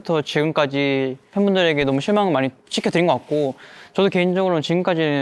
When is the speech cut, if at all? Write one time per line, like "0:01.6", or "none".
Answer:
0:01.2